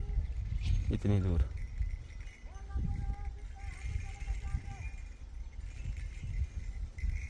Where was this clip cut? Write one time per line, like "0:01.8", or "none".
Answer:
none